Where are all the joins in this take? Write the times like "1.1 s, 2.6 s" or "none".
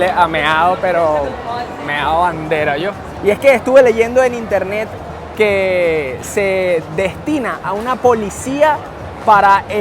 3.1 s